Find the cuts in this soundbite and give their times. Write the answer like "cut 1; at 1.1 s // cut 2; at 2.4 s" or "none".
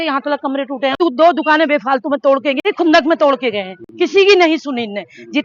cut 1; at 1.0 s // cut 2; at 2.6 s